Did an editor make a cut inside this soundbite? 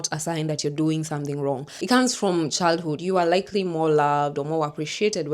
yes; 1 cut; at 1.7 s

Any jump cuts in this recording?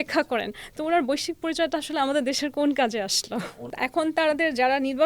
yes; 1 cut; at 3.6 s

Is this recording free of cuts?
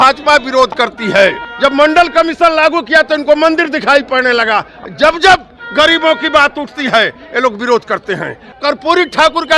no; 3 cuts; at 1.4 s, 4.8 s, 8.5 s

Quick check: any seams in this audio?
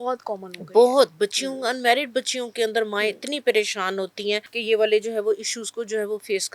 yes; 1 cut; at 4.5 s

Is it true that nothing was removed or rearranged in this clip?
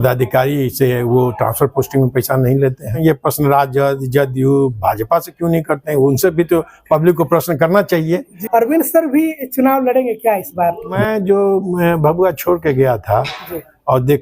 no; 3 cuts; at 2.9 s, 8.4 s, 11.0 s

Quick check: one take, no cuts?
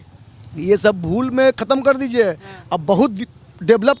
yes; 0 cuts

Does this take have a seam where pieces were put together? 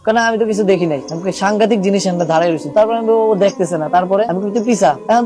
yes; 2 cuts; at 2.6 s, 4.3 s

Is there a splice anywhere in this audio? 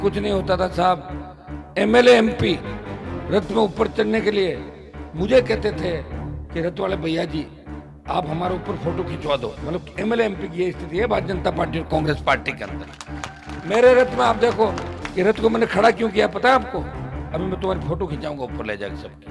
no; 0 cuts

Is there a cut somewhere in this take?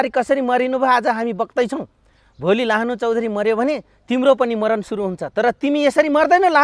no; 0 cuts

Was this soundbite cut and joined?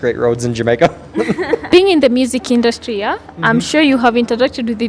yes; 1 cut; at 1.7 s

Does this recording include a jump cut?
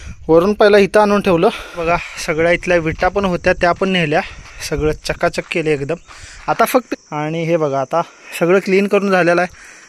yes; 2 cuts; at 1.8 s, 6.9 s

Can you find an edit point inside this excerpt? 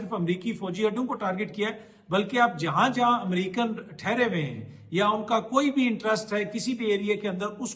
no; 0 cuts

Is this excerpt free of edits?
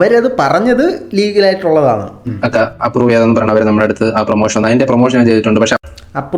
no; 1 cut; at 2.4 s

